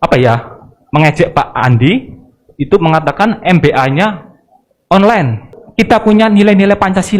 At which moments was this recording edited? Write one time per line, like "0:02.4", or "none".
0:05.6